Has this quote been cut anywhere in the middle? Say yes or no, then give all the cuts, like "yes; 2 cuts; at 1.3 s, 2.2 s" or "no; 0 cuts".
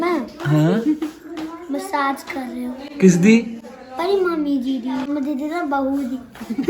yes; 1 cut; at 5.1 s